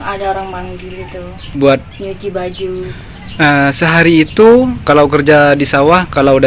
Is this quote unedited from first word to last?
no; 2 cuts; at 1.5 s, 2.9 s

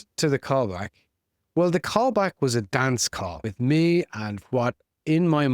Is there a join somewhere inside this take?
yes; 1 cut; at 3.4 s

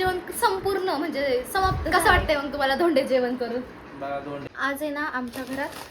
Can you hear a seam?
yes; 2 cuts; at 1.8 s, 4.5 s

